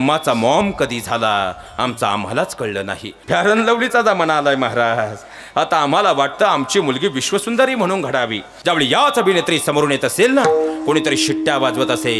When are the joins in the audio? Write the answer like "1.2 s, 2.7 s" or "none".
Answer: 3.1 s, 8.5 s